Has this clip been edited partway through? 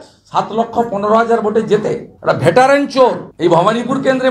yes; 1 cut; at 3.2 s

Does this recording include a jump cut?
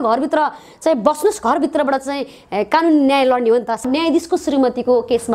yes; 1 cut; at 3.8 s

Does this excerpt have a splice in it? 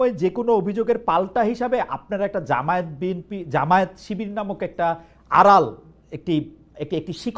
no; 0 cuts

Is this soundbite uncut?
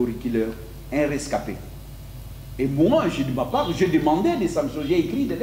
yes; 0 cuts

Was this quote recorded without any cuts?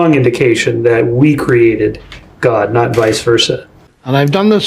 no; 1 cut; at 3.8 s

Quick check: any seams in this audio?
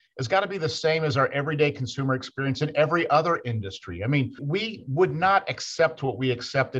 yes; 1 cut; at 4.4 s

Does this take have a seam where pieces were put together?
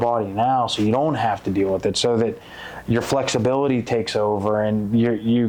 no; 0 cuts

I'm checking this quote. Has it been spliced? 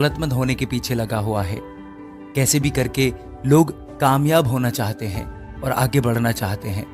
no; 0 cuts

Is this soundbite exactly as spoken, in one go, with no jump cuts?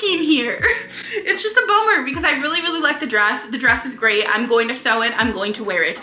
yes; 0 cuts

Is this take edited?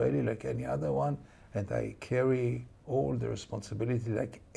no; 0 cuts

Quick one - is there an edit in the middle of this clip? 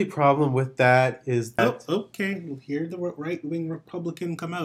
yes; 1 cut; at 1.6 s

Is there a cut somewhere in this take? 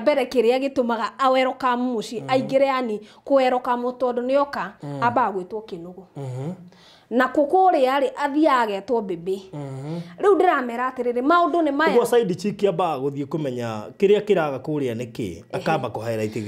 no; 0 cuts

